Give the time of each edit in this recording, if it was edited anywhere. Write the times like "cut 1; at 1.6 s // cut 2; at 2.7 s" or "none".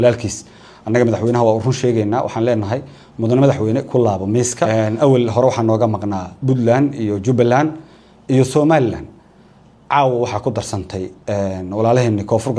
cut 1; at 4.7 s